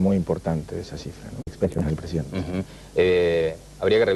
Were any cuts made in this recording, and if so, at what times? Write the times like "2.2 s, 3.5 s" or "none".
none